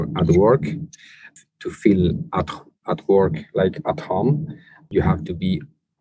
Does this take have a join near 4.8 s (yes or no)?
yes